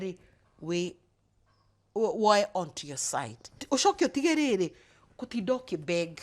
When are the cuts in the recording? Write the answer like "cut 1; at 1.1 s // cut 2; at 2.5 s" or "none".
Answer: cut 1; at 3.6 s